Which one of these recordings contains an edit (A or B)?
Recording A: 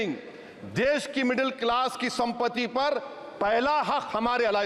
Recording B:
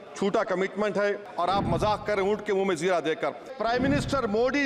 B